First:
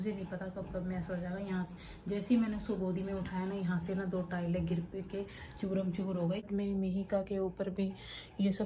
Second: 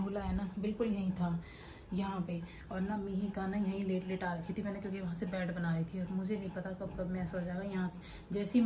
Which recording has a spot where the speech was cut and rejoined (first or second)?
first